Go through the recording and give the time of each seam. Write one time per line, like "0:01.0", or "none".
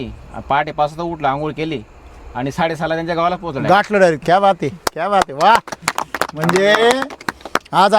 0:04.2